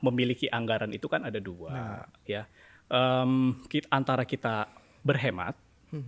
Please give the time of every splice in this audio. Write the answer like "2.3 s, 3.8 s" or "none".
none